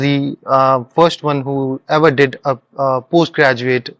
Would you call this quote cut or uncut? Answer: uncut